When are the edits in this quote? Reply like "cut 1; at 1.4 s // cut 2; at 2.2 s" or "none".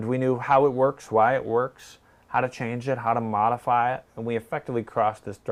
none